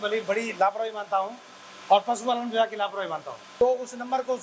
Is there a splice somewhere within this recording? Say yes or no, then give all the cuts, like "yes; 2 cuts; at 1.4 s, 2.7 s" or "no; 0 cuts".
yes; 1 cut; at 3.4 s